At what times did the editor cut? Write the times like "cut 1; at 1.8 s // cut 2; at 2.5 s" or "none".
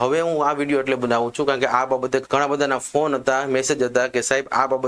cut 1; at 2.2 s